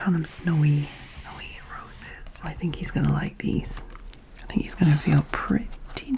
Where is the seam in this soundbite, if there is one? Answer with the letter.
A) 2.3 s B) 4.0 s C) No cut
A